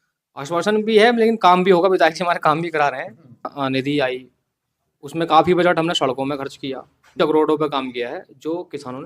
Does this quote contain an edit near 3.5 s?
yes; 2 cuts; at 3.5 s, 7.2 s

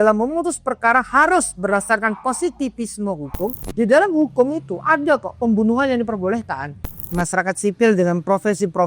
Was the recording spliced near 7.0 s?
yes; 2 cuts; at 3.6 s, 7.0 s

